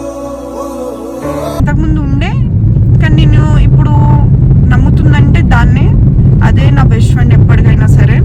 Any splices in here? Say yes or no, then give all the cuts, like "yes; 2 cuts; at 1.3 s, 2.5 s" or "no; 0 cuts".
no; 0 cuts